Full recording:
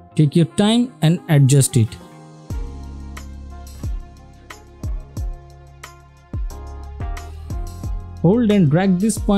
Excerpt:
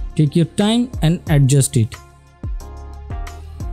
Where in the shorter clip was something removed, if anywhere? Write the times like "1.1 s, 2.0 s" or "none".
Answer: 1.9 s